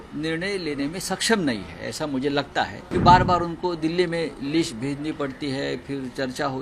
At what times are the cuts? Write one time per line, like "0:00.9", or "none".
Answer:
0:02.8